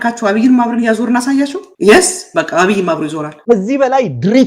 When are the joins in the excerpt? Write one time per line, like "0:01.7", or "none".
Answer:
0:01.6
0:03.4